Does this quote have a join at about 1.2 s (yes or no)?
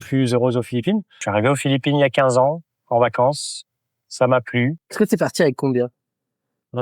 yes